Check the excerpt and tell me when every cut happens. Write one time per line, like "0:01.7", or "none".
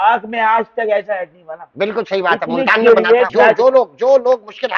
0:03.3